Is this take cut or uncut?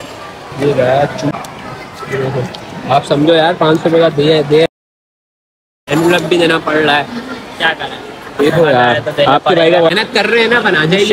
uncut